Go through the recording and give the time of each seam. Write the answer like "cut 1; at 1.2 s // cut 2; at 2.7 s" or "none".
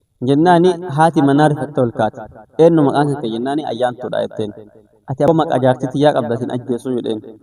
cut 1; at 5.3 s

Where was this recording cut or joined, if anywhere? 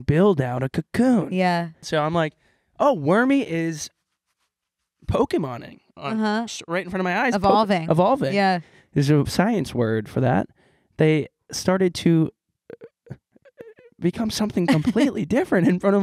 cut 1; at 1.8 s

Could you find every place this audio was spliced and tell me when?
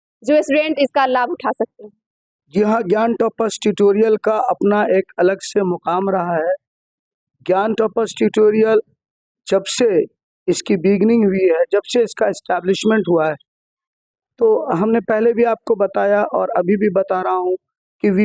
none

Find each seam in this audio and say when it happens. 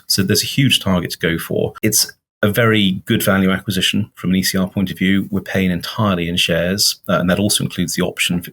cut 1; at 1.7 s

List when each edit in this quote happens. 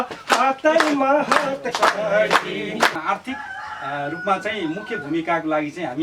cut 1; at 3.0 s

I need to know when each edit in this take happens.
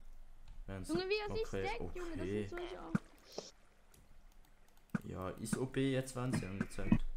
none

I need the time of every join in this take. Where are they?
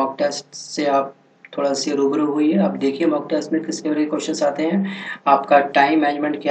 cut 1; at 3.1 s

